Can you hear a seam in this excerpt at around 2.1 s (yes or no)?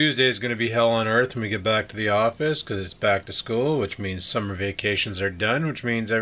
no